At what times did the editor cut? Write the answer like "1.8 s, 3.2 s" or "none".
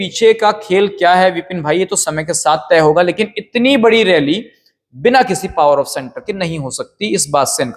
none